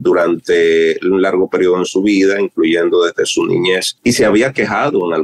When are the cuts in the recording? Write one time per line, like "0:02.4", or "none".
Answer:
0:03.9